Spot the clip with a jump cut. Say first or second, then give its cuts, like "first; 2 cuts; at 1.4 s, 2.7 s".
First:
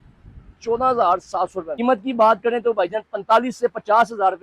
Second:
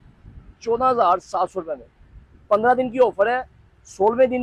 first; 1 cut; at 1.7 s